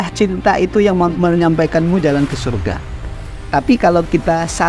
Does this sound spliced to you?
yes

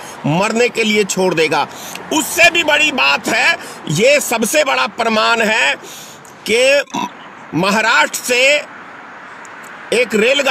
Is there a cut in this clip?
no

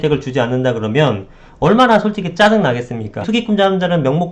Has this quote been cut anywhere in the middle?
yes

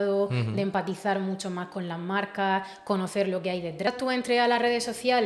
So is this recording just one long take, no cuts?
no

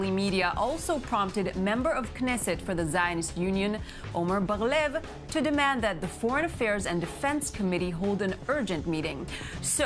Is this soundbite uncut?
yes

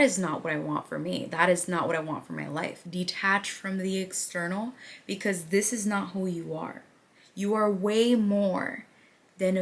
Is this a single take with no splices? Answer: no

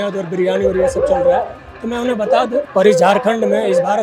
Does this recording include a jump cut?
yes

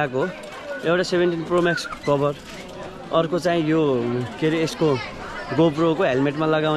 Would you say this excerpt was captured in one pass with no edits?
yes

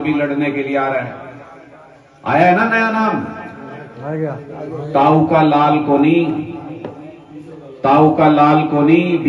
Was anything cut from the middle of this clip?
no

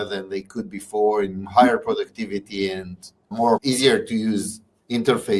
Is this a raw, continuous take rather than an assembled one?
no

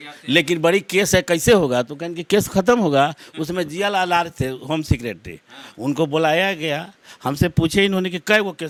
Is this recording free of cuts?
yes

